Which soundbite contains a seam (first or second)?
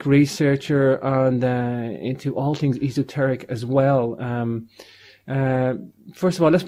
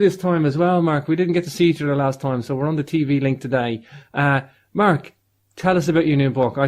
second